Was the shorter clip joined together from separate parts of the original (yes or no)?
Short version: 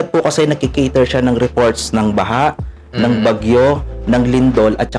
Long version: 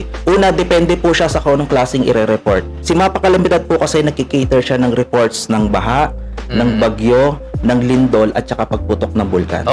no